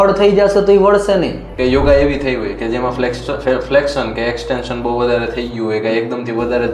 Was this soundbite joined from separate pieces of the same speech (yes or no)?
yes